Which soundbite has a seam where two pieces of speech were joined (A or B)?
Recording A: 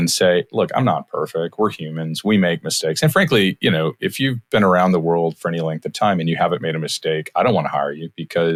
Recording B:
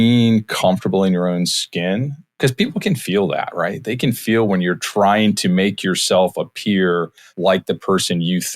B